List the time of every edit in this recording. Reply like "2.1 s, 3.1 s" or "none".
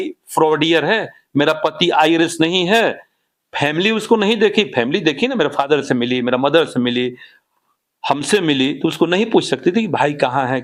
none